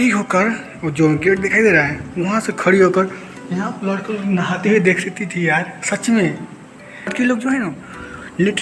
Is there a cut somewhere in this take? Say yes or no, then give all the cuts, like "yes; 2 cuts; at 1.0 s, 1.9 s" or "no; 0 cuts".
yes; 1 cut; at 7.1 s